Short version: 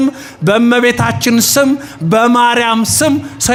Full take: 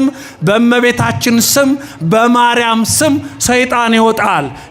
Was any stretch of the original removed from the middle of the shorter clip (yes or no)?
no